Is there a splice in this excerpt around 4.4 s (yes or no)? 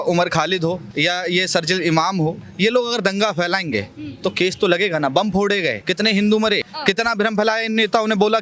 no